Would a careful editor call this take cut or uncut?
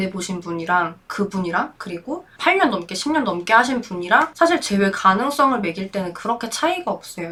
uncut